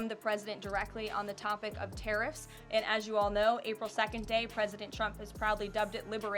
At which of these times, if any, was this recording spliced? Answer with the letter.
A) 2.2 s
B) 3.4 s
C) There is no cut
C